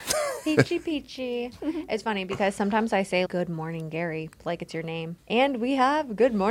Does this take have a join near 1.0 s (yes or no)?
no